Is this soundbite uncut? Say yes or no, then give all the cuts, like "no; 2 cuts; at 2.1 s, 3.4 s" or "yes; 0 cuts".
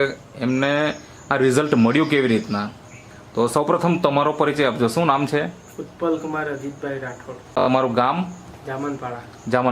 no; 1 cut; at 7.7 s